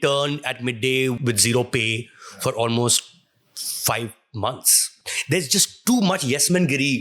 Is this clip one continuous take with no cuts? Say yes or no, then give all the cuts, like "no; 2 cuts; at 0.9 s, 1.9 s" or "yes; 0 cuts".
no; 2 cuts; at 1.2 s, 5.1 s